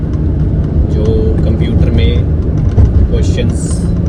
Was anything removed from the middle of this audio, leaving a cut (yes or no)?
no